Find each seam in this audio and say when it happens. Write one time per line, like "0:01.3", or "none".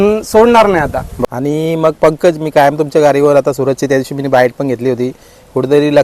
0:01.1

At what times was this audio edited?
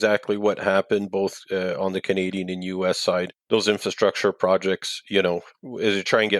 0:03.4

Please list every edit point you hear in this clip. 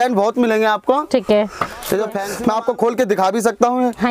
0:02.2

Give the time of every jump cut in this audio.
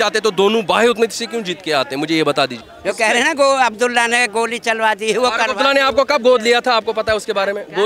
0:02.7

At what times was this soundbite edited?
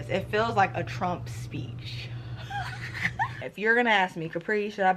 0:03.4

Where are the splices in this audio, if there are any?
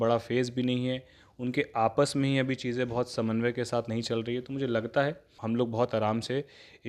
0:05.3

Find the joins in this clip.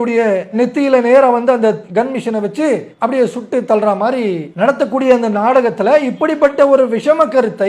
0:01.8
0:02.9
0:04.5

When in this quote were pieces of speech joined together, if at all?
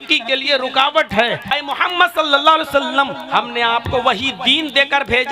0:01.4

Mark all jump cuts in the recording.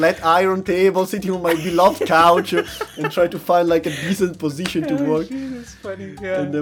none

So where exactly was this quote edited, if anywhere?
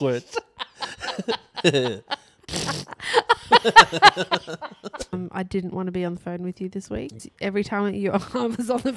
0:05.1
0:07.2

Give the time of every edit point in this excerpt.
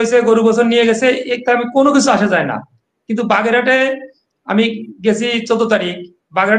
none

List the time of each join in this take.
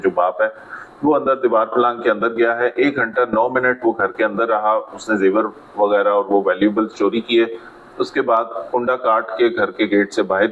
none

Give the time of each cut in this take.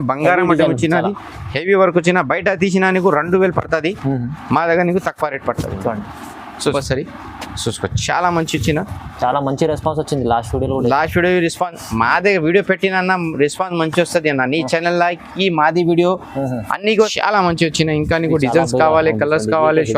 0:06.7
0:17.1

